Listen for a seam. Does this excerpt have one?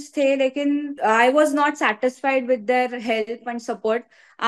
yes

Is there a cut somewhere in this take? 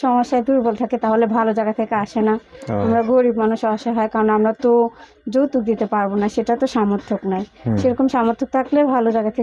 no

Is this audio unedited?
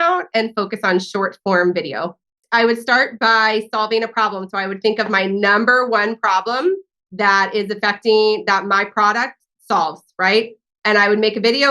no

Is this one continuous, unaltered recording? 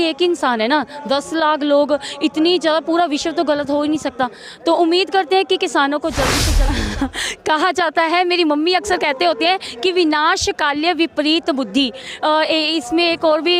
no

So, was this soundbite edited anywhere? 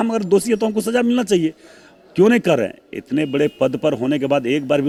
no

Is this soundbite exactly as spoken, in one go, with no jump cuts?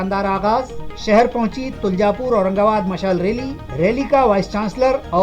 yes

